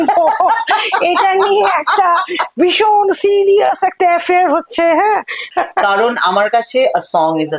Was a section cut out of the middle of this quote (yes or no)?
yes